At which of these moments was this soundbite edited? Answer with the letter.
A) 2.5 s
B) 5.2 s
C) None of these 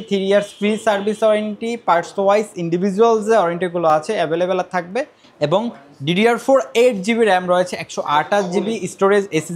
B